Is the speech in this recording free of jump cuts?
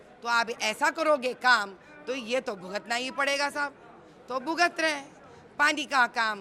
yes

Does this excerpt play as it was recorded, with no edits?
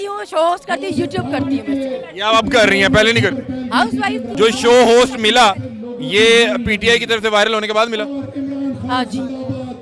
no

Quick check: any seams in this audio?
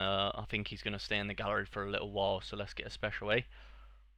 no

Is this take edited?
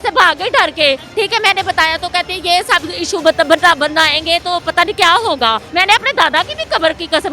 yes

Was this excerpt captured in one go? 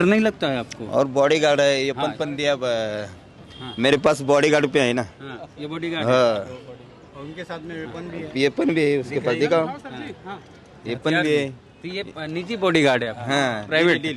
yes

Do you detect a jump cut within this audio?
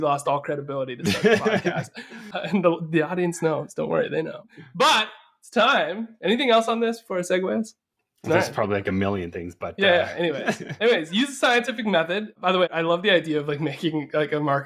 no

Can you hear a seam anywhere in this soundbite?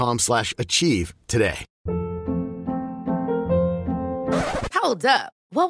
yes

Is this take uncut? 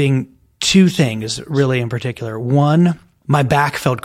no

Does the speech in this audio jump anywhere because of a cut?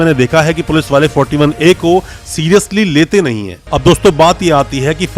yes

